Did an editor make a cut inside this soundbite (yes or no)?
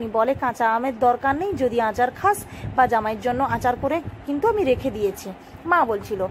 no